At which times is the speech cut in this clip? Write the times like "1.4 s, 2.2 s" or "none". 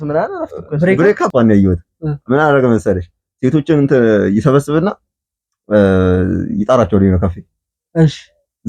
1.3 s